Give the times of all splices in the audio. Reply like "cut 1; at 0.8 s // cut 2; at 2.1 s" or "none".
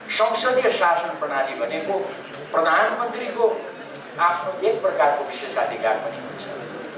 none